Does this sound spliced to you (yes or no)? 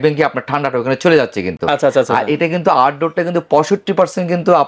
no